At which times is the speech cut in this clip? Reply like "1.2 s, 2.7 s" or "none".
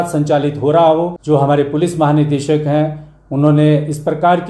1.2 s

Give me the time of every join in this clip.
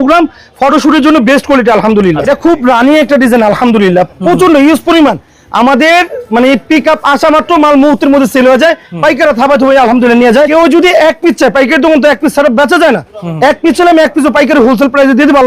2.2 s, 10.5 s

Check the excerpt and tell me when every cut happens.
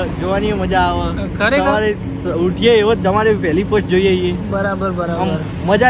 none

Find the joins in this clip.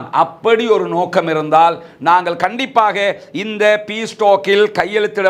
none

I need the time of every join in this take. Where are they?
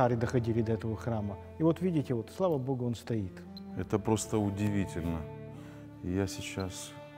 3.4 s

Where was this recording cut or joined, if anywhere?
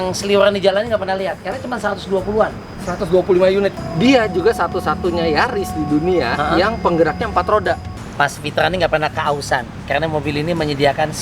3.8 s, 8.0 s

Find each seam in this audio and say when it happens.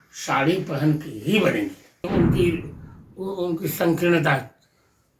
2.1 s

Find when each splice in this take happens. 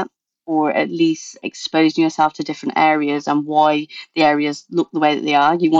1.4 s

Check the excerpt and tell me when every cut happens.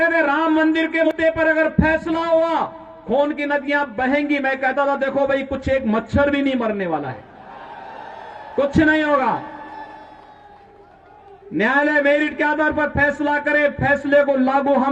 1.1 s

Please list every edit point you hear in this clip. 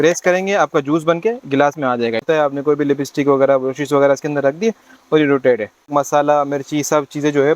2.2 s, 5.9 s

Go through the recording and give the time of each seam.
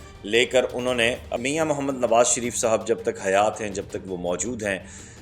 1.4 s

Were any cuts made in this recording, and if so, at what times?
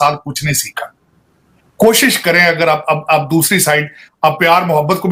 none

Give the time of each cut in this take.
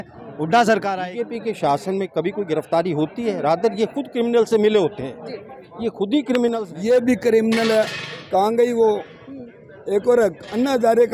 1.0 s, 6.6 s

